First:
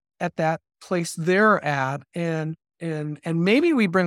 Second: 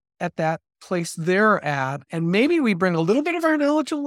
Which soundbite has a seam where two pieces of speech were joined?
second; 1 cut; at 2.0 s

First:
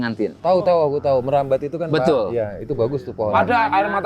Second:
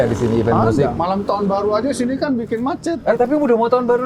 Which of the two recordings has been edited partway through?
second; 2 cuts; at 1.0 s, 3.0 s

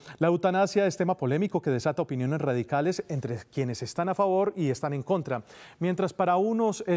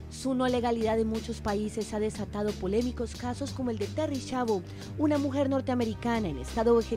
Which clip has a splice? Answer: second; 1 cut; at 4.0 s

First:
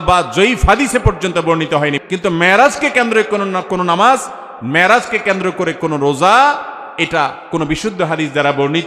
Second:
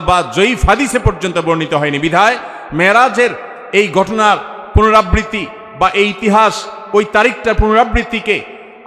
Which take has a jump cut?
first; 1 cut; at 2.0 s

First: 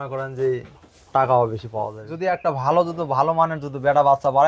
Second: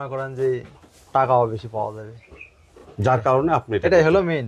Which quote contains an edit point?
first; 1 cut; at 2.0 s

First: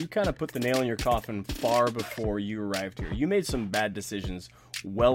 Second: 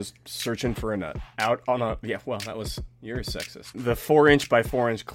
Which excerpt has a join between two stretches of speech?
second; 2 cuts; at 1.3 s, 3.7 s

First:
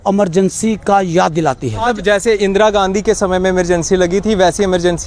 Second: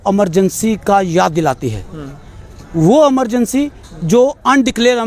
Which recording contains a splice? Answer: first; 1 cut; at 1.9 s

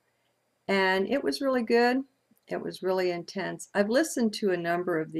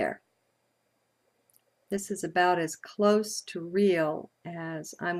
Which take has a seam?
first; 1 cut; at 3.9 s

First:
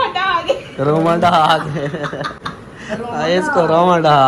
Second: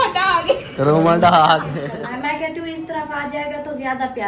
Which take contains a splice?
second; 1 cut; at 1.9 s

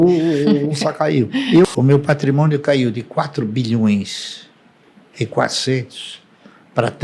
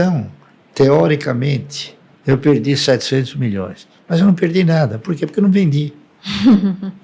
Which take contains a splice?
first; 1 cut; at 1.6 s

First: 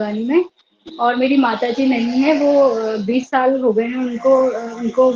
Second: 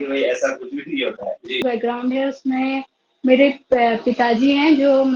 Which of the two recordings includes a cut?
second; 1 cut; at 1.6 s

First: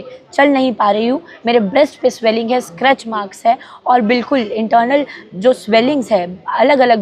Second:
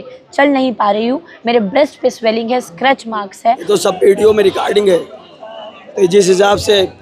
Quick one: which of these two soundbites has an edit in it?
second; 1 cut; at 3.7 s

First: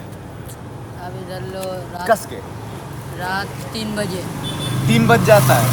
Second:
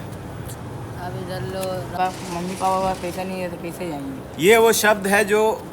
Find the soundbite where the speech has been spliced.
second; 1 cut; at 2.0 s

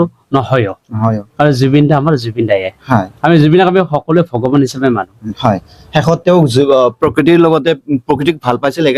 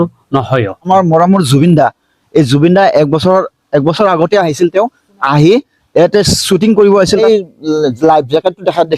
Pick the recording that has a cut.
second; 2 cuts; at 0.8 s, 7.2 s

